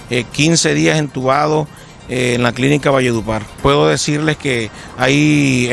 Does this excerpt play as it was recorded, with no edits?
no; 1 cut; at 3.5 s

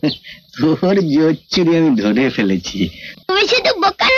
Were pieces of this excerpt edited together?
yes; 1 cut; at 3.1 s

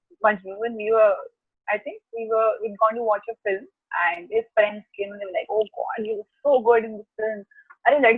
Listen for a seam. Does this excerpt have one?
no; 0 cuts

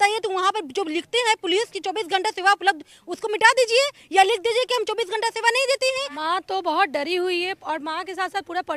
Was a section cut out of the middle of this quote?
yes; 1 cut; at 6.1 s

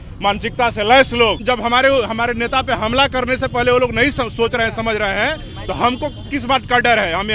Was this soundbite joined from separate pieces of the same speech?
yes; 1 cut; at 1.4 s

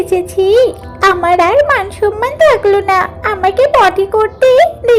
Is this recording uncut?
yes; 0 cuts

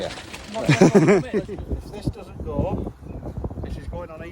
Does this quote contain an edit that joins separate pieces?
yes; 1 cut; at 1.4 s

